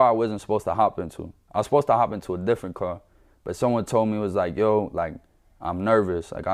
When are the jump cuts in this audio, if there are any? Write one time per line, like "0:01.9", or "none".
none